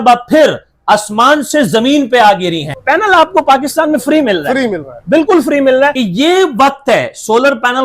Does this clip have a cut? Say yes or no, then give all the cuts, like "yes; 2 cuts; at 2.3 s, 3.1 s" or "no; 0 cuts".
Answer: yes; 2 cuts; at 2.7 s, 6.0 s